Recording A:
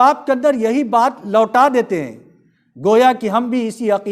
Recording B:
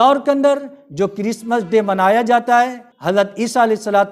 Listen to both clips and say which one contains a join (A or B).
B